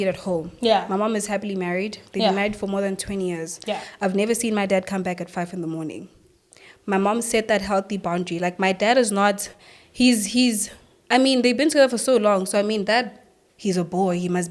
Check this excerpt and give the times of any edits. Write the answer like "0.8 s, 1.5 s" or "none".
none